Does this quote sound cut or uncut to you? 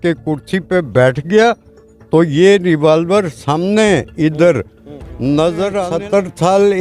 cut